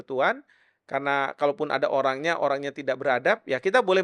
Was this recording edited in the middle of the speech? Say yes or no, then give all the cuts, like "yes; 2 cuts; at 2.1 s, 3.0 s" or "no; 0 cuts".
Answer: no; 0 cuts